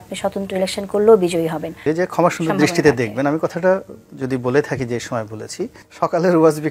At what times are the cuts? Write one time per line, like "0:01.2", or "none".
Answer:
0:01.8
0:05.8